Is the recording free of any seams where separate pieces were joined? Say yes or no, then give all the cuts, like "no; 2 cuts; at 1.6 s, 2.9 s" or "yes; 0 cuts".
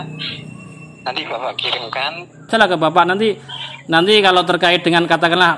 no; 1 cut; at 2.5 s